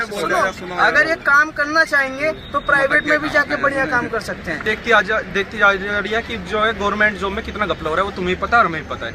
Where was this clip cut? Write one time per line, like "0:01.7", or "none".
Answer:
0:04.6